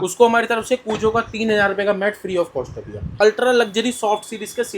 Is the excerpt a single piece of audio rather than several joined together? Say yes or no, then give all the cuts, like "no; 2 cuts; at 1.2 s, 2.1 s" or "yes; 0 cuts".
no; 1 cut; at 3.1 s